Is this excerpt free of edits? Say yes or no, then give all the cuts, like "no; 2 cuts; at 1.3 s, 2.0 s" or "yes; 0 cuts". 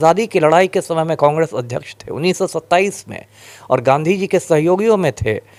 yes; 0 cuts